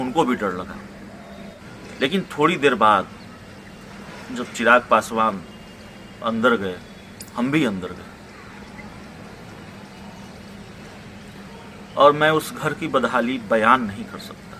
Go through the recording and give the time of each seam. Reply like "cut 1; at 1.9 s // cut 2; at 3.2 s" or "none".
cut 1; at 1.6 s